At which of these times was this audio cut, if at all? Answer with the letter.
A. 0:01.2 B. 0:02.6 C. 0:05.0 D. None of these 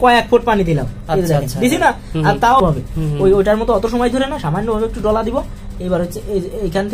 B